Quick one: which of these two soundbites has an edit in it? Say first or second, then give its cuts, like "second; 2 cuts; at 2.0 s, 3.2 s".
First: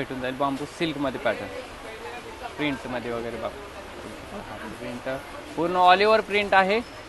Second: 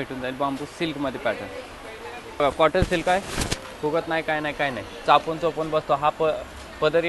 second; 1 cut; at 2.4 s